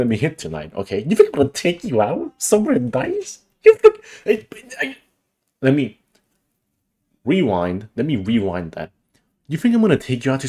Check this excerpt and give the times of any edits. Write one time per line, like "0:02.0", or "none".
none